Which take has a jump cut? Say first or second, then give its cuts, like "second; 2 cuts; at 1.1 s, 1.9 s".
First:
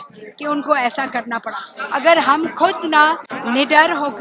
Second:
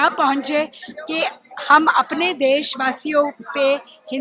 first; 2 cuts; at 1.7 s, 3.3 s